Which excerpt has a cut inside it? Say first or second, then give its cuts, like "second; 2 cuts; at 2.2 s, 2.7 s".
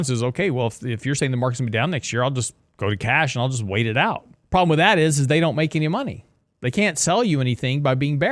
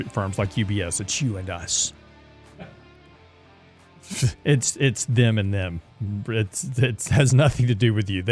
first; 1 cut; at 4.3 s